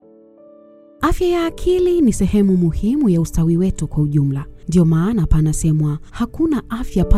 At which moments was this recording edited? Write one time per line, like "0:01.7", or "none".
0:01.0